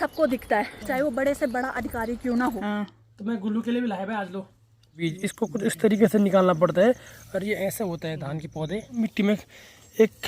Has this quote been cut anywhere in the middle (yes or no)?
yes